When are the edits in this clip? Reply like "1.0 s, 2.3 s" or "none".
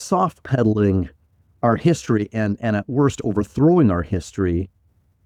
none

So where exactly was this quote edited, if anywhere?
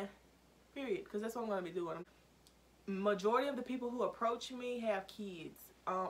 2.0 s

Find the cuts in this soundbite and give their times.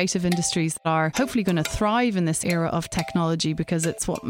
0.7 s, 2.4 s

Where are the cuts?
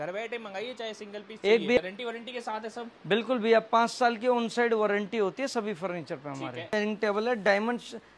1.8 s, 6.7 s

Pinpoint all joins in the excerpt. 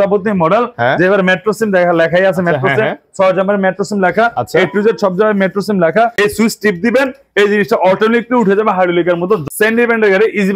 6.2 s, 9.4 s

